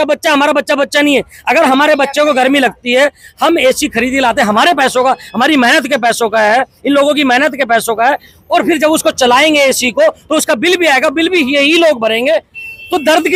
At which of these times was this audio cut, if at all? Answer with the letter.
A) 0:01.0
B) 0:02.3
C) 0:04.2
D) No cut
D